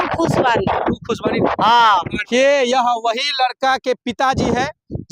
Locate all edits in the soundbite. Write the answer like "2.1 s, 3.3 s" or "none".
2.3 s